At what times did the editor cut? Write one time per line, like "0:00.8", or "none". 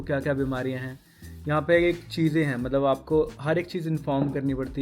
none